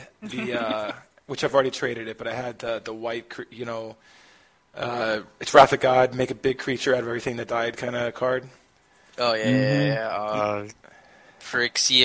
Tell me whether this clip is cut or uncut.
uncut